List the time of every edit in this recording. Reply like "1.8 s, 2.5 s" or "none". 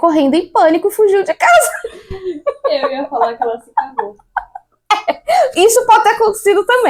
none